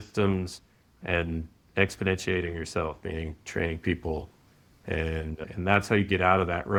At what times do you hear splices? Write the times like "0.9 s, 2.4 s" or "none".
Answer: none